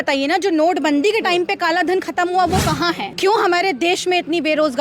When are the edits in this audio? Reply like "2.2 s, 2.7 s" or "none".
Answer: 3.1 s

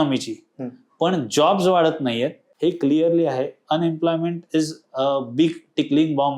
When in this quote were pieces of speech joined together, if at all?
2.4 s

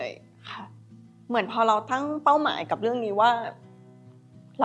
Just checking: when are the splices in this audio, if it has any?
none

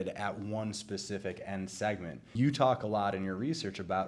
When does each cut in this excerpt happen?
2.3 s

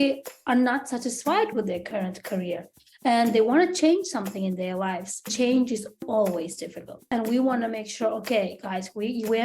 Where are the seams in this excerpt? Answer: 1.8 s, 5.3 s, 7.0 s

